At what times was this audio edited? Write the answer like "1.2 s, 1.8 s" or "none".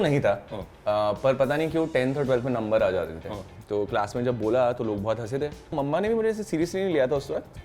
3.5 s, 5.7 s